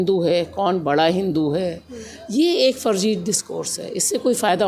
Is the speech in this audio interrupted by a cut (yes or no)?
no